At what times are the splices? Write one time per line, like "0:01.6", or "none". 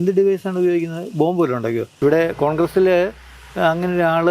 0:01.9